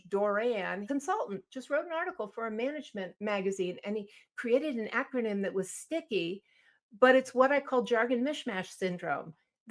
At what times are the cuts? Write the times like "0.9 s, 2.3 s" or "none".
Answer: 0.8 s, 3.1 s